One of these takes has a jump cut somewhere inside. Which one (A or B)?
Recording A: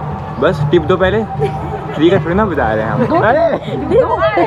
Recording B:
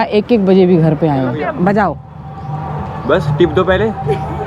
B